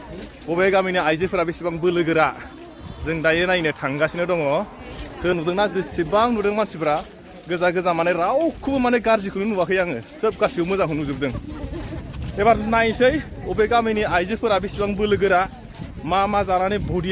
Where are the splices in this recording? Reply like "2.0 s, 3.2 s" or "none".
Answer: 5.3 s